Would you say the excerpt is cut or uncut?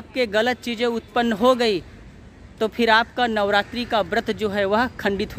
uncut